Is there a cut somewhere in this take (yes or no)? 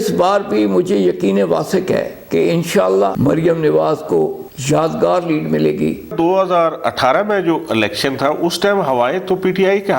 yes